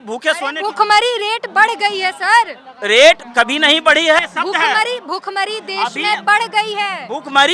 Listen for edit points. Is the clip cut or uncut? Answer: cut